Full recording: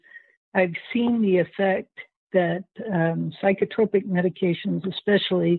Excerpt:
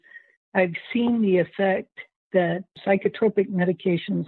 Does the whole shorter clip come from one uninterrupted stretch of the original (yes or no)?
no